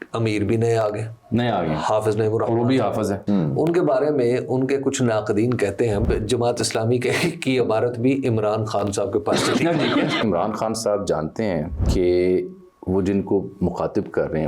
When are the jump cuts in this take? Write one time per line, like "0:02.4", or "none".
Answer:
0:03.2
0:06.0
0:10.2
0:11.8

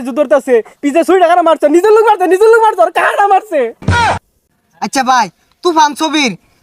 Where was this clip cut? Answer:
0:04.1

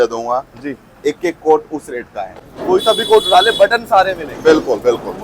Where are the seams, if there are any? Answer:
0:02.5

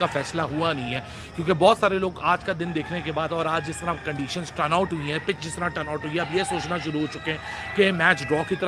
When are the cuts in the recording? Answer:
none

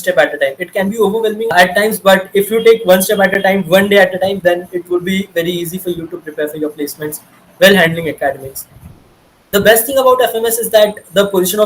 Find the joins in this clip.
0:01.5

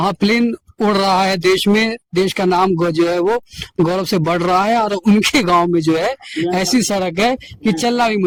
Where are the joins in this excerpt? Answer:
none

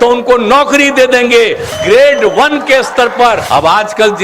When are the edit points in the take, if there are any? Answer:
0:01.7
0:03.4

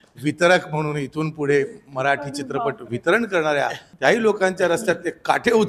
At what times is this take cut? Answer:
0:03.8

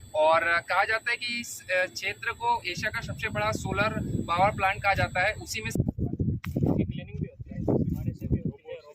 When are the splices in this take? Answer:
0:05.8

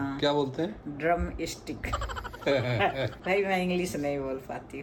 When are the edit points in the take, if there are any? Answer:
none

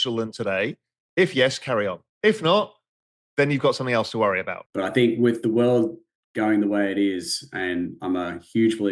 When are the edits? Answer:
0:02.1
0:04.6

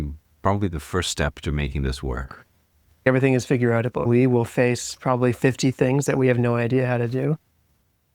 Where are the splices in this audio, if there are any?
0:03.0
0:04.0

